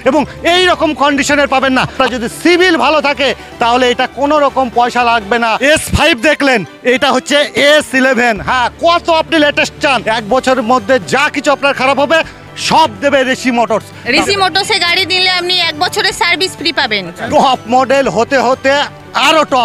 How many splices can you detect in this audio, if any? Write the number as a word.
five